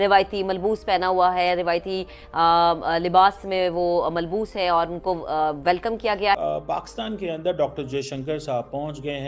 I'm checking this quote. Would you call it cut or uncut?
cut